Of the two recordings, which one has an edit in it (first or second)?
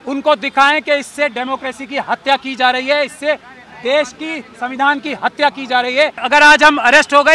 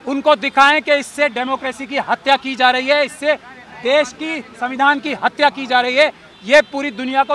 first